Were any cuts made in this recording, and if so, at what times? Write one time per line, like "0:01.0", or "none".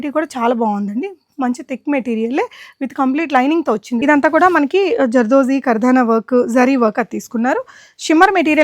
0:04.0